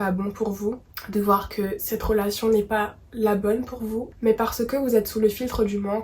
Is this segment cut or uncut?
cut